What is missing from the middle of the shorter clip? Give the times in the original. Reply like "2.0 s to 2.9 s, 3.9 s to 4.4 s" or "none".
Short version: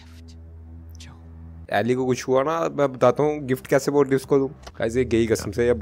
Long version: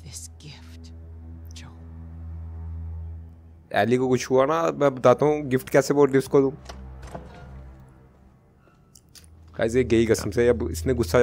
2.2 s to 3.7 s, 6.7 s to 9.4 s

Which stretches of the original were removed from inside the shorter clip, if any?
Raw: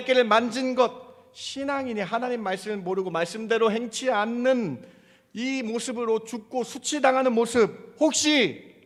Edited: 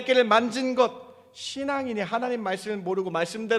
none

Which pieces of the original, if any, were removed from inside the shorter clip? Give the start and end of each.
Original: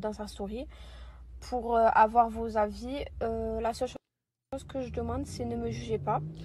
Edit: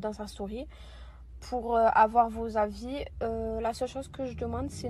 3.9 s to 4.5 s

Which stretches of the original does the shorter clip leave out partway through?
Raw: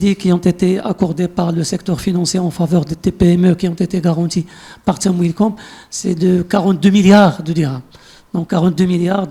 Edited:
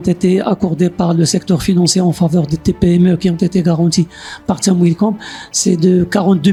none

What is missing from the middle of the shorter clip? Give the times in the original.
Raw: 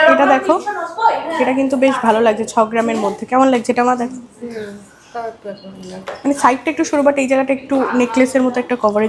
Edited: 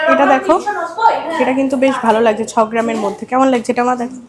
none

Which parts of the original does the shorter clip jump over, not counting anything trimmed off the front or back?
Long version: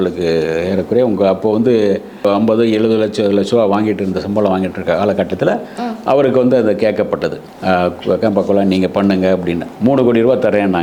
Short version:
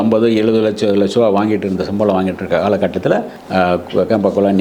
5.7 s to 7.5 s

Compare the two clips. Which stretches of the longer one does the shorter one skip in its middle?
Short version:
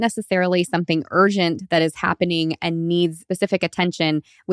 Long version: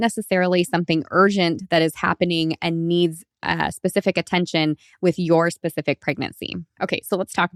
3.2 s to 3.8 s

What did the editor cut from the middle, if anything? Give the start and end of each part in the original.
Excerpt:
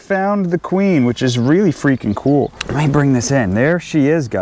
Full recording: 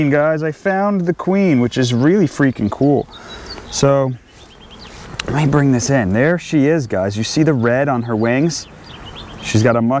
3.2 s to 5.2 s

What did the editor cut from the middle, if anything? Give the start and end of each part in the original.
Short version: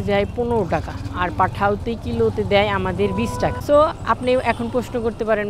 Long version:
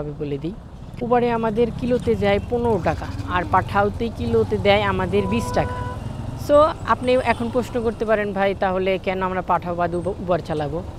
5.7 s to 6.4 s

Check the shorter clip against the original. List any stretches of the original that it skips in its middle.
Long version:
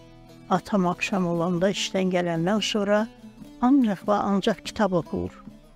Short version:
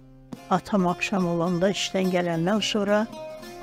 none

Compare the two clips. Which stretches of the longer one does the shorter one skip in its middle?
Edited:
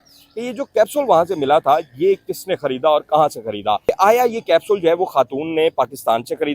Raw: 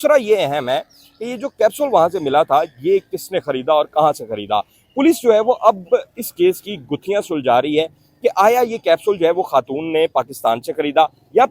4.6 s to 8.2 s

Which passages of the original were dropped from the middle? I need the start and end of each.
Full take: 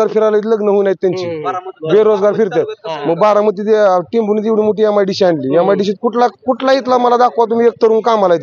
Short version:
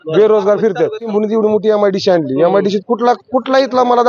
2.8 s to 4.2 s

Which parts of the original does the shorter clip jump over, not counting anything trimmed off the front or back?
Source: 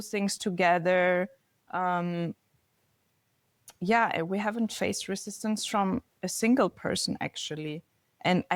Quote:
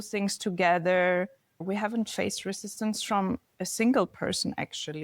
1.6 s to 4.3 s

